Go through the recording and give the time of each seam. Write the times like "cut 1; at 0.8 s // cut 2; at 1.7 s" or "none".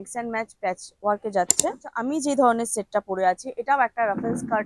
cut 1; at 1.9 s